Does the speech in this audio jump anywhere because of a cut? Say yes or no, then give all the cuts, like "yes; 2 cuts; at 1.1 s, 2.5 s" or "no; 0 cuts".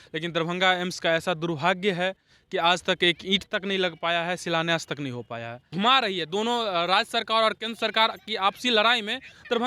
yes; 1 cut; at 5.8 s